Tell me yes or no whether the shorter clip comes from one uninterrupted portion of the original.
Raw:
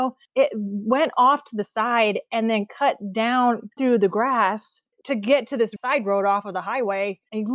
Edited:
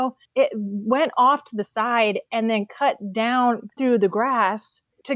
yes